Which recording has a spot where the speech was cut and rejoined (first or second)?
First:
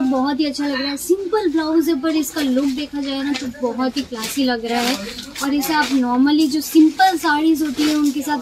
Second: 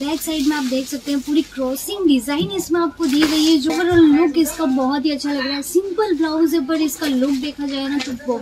second